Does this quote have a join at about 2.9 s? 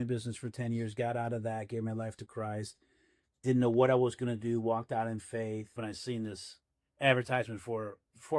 no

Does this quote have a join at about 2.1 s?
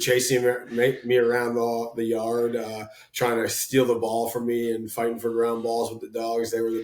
no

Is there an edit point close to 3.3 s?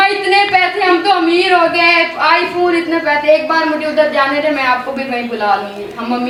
no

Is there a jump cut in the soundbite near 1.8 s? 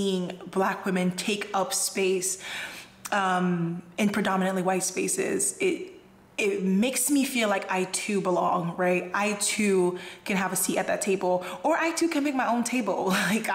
no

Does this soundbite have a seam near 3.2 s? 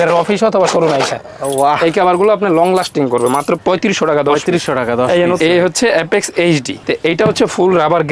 no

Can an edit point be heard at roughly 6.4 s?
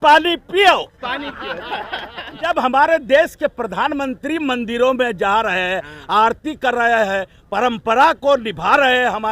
no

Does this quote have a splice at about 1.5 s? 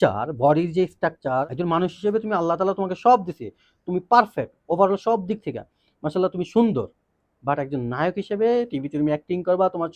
yes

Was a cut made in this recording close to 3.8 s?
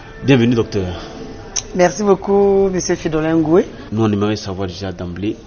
yes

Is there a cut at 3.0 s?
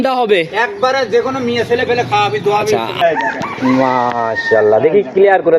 yes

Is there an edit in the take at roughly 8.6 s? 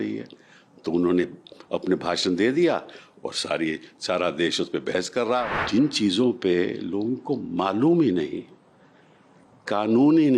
no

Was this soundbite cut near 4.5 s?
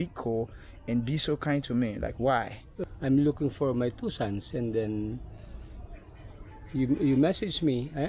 no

